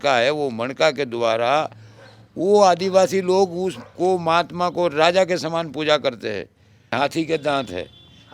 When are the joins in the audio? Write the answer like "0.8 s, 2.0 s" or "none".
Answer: 6.9 s

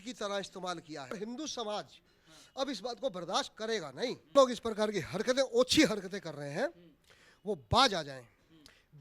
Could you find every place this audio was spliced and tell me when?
1.1 s, 4.3 s

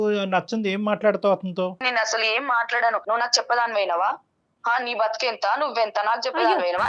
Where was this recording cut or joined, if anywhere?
1.8 s, 3.0 s

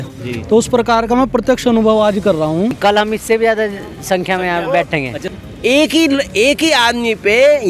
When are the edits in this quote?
2.8 s, 5.2 s

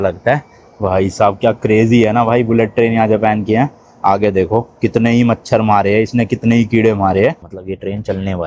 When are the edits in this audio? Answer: 7.5 s

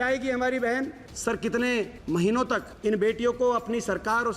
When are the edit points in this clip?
1.1 s, 2.4 s

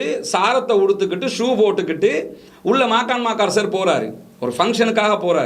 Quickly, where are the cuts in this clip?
none

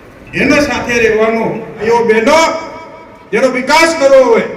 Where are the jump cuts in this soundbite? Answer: 1.7 s

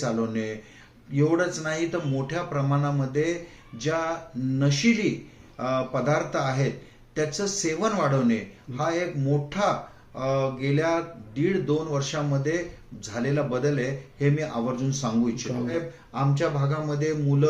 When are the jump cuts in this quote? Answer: 15.7 s

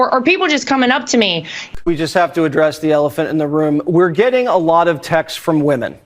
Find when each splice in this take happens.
1.5 s

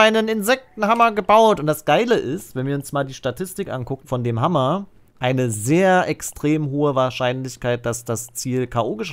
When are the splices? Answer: 4.0 s, 5.1 s

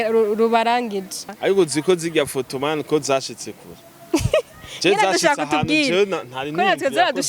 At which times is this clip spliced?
1.3 s

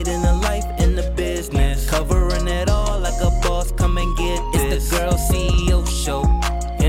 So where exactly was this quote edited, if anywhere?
none

